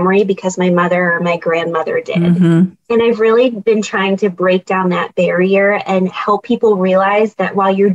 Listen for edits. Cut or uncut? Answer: uncut